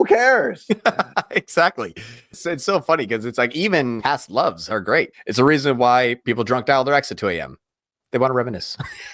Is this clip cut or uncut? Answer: cut